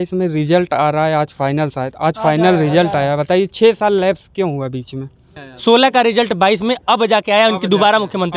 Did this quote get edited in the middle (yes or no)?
yes